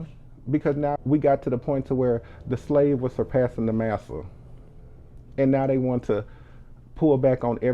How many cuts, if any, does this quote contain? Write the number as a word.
one